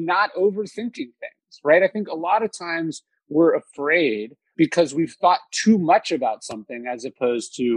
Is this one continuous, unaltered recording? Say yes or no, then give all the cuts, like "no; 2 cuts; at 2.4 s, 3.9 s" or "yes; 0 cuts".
no; 1 cut; at 4.4 s